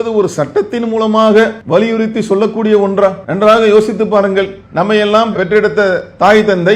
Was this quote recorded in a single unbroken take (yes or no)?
no